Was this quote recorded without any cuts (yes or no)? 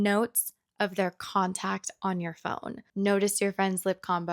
no